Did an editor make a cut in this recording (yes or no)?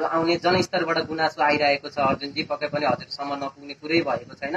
no